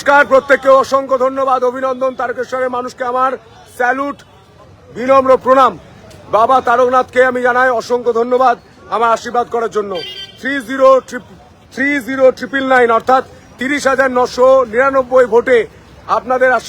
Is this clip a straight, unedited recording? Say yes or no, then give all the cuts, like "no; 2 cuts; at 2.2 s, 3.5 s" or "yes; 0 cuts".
no; 1 cut; at 2.2 s